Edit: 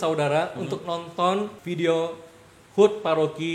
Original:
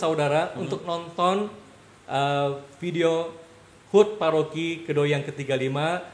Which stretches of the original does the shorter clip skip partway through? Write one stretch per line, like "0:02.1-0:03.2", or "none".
0:01.6-0:02.8